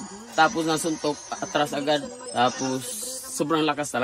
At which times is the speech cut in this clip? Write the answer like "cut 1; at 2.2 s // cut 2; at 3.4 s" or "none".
cut 1; at 2.2 s